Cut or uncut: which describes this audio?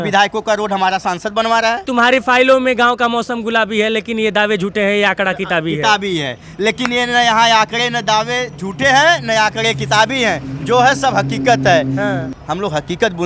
cut